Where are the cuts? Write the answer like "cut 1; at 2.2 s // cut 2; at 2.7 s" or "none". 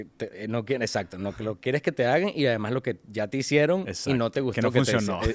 none